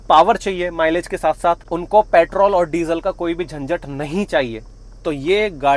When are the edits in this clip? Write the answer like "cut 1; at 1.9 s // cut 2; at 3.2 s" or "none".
cut 1; at 1.6 s